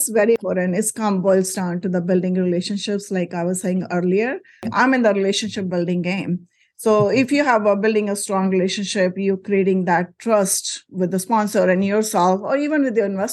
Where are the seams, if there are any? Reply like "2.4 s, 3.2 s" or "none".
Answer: none